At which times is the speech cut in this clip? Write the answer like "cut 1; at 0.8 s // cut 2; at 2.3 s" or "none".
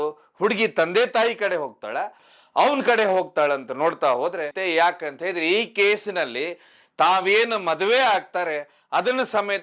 cut 1; at 2.1 s // cut 2; at 4.5 s